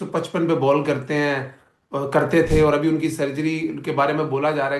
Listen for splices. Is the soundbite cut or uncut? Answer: uncut